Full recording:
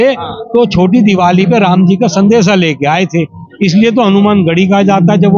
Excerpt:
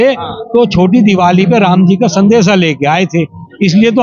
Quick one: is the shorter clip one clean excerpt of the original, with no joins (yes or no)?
yes